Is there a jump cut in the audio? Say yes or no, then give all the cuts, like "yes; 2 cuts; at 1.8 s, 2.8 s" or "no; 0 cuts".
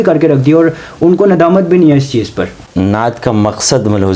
yes; 1 cut; at 2.6 s